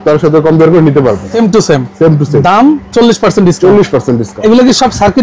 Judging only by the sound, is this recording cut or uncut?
cut